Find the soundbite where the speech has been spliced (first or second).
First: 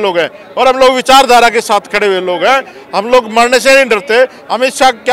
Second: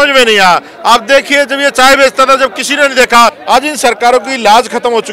second